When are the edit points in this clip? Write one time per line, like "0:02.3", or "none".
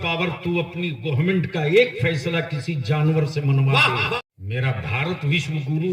0:04.2